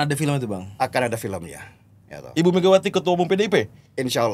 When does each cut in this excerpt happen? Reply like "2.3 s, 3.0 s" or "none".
none